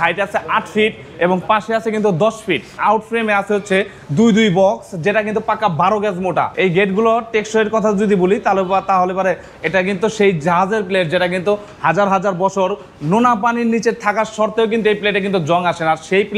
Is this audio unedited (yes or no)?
no